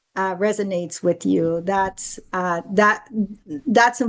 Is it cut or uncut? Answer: uncut